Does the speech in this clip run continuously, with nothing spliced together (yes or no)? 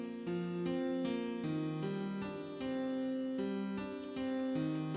no